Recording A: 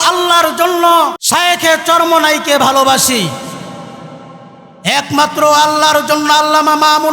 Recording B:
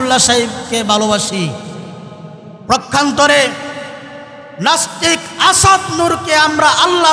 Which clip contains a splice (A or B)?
A